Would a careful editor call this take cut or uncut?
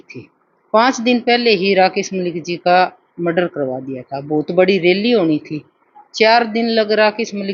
uncut